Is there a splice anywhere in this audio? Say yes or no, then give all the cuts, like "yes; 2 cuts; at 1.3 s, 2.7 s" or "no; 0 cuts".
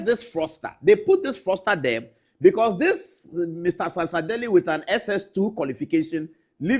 no; 0 cuts